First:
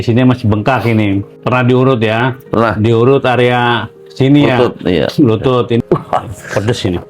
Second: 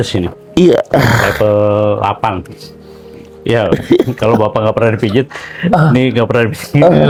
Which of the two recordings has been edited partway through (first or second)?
first